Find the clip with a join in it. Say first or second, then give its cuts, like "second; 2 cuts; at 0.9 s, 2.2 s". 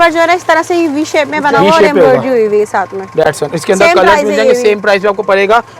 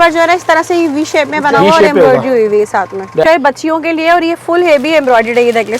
second; 1 cut; at 3.2 s